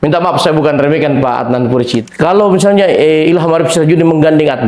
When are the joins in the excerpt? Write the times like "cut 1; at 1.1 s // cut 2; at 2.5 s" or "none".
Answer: cut 1; at 2.0 s